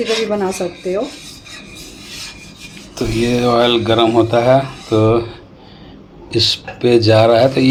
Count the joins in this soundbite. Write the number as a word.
zero